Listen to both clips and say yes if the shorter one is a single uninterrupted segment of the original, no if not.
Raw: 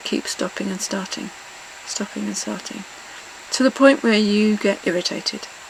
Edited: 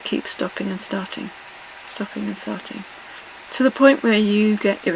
yes